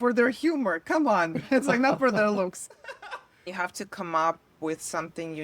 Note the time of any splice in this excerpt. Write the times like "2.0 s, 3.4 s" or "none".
3.4 s